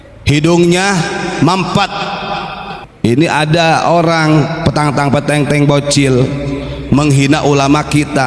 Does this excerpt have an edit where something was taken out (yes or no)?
yes